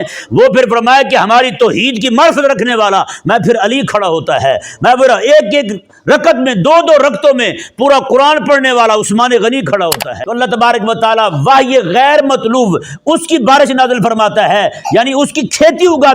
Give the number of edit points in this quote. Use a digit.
1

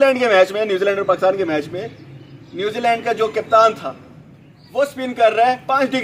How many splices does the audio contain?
0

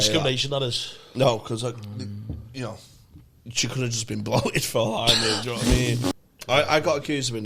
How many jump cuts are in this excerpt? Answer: 1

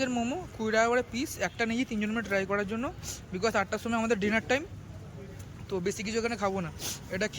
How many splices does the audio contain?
0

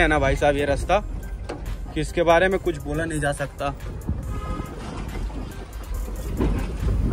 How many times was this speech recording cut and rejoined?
0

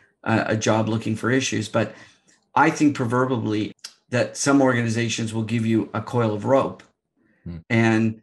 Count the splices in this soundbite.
1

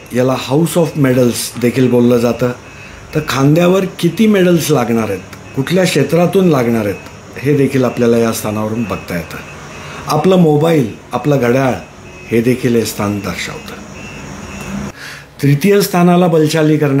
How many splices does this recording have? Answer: 0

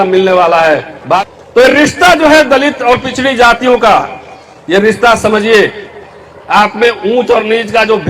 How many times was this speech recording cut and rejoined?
1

